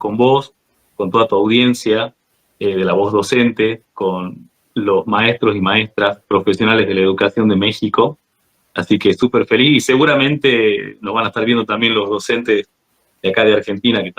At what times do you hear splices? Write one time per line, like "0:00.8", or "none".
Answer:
none